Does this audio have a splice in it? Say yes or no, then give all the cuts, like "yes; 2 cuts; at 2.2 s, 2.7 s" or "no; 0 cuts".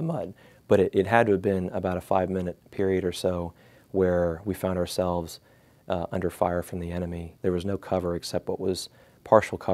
yes; 1 cut; at 7.2 s